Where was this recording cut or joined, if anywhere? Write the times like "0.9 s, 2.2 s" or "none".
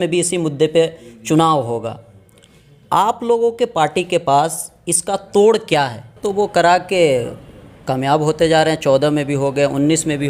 6.2 s